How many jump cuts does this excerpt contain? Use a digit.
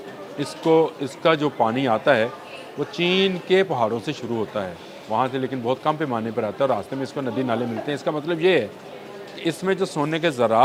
0